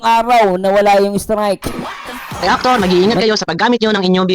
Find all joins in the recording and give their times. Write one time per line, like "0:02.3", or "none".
0:02.4